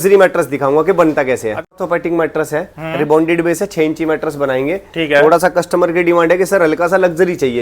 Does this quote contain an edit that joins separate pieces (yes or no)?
yes